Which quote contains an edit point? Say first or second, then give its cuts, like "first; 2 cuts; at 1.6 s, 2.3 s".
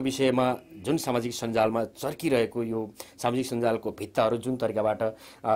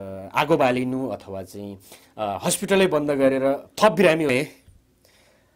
second; 1 cut; at 4.3 s